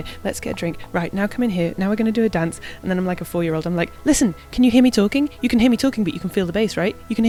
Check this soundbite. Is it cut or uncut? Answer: uncut